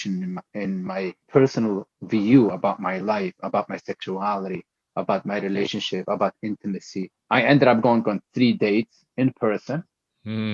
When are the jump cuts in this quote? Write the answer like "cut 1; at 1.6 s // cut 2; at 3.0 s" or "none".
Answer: cut 1; at 1.2 s // cut 2; at 7.1 s